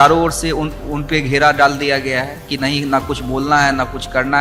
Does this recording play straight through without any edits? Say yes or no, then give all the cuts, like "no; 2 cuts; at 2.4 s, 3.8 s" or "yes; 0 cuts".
yes; 0 cuts